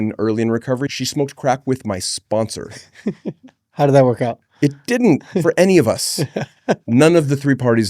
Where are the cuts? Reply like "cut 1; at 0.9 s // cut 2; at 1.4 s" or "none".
cut 1; at 0.9 s